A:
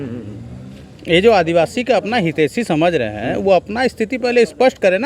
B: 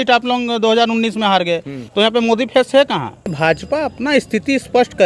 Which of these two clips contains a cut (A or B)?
B